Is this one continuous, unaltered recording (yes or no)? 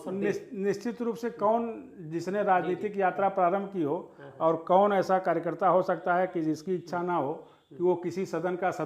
yes